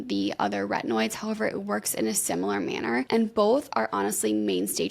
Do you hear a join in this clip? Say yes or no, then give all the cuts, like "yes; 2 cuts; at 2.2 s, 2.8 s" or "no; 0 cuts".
yes; 1 cut; at 3.1 s